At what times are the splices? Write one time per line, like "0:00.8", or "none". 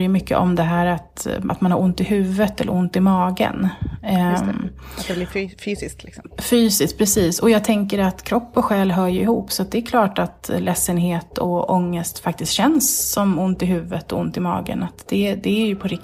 none

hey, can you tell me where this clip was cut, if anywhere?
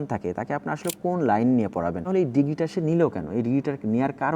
0:02.0

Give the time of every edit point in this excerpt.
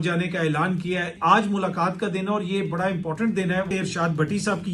0:01.1
0:03.7

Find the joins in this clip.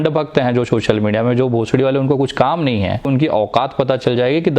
0:03.1

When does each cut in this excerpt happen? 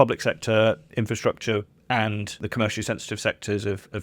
0:02.4

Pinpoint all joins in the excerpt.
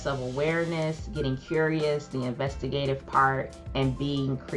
0:03.6

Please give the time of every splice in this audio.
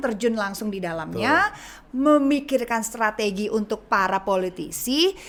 none

